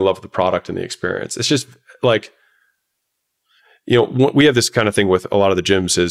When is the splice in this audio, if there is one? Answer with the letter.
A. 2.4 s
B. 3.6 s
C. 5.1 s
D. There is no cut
D